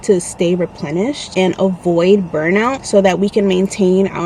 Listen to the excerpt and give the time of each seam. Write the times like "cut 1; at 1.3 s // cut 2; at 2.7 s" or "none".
cut 1; at 1.2 s